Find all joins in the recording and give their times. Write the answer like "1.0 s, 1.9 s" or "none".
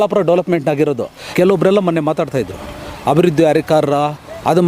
1.2 s